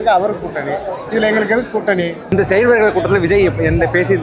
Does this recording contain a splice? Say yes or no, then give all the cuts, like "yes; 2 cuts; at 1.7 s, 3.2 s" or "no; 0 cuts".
yes; 1 cut; at 2.2 s